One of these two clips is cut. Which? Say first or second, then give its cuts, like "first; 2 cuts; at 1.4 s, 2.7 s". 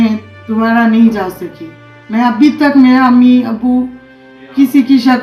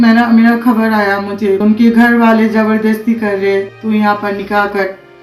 second; 2 cuts; at 1.6 s, 3.7 s